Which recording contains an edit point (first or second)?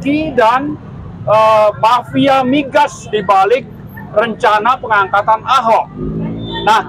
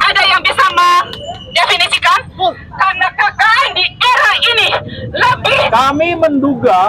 second